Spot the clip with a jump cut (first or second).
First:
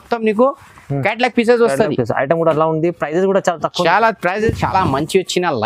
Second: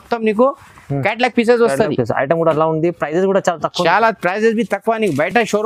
first